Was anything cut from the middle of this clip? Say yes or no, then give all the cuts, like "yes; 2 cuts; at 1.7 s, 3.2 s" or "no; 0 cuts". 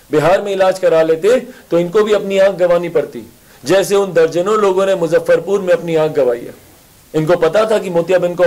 no; 0 cuts